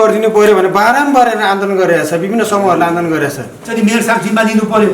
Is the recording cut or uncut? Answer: cut